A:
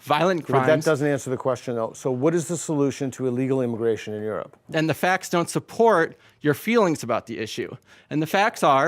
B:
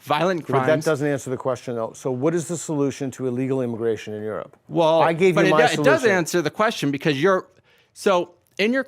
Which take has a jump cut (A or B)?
A